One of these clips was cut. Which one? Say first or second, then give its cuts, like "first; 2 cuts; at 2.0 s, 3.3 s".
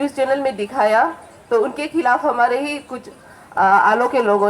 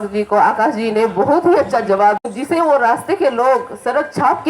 second; 1 cut; at 2.3 s